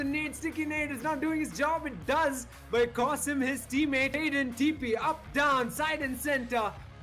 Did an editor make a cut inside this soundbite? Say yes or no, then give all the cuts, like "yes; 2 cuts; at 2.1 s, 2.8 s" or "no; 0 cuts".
yes; 1 cut; at 4.2 s